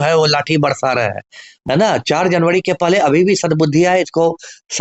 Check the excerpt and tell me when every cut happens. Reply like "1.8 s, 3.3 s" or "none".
1.5 s